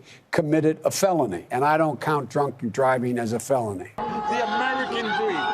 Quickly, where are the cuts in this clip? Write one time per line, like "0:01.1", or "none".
0:01.5
0:04.0